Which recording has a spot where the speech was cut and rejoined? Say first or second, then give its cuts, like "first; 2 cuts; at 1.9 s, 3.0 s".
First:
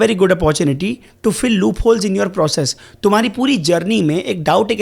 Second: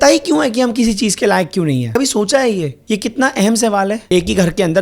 second; 3 cuts; at 1.9 s, 2.7 s, 4.0 s